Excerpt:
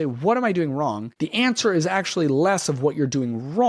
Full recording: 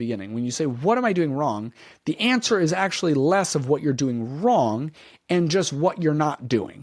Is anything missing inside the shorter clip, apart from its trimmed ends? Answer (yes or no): yes